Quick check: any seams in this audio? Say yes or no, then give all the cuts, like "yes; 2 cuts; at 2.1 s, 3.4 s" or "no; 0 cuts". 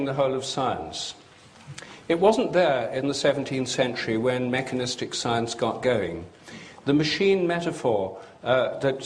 yes; 1 cut; at 3.4 s